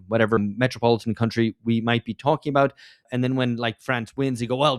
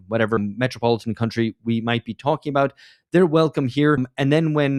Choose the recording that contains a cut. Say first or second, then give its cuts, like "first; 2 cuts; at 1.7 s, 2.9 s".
first; 1 cut; at 3.0 s